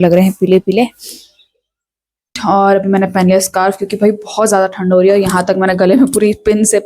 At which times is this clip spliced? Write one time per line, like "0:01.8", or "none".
0:02.3